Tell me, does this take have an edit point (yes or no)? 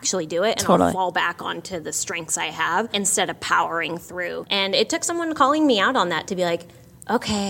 yes